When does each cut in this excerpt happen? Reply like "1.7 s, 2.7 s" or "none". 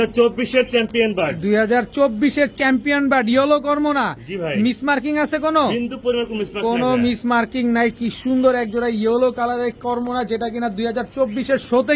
none